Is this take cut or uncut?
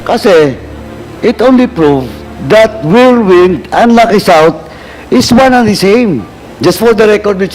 cut